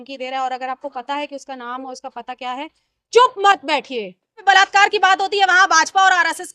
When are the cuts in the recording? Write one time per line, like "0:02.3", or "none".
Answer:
0:04.4